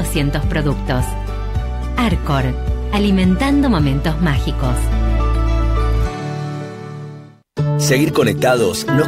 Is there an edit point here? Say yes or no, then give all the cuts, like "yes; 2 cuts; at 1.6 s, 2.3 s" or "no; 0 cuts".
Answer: no; 0 cuts